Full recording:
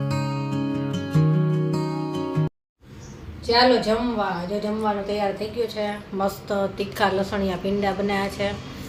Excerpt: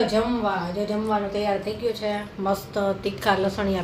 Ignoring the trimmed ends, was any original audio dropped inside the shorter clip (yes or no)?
no